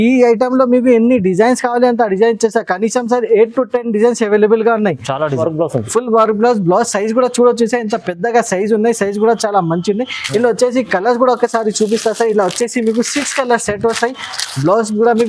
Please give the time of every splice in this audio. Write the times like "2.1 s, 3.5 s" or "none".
5.3 s